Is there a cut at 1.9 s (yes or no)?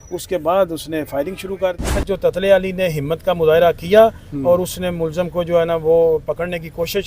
yes